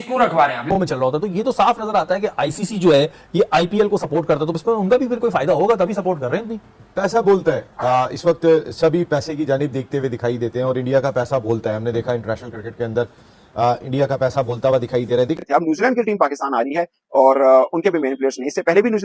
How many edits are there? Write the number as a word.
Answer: two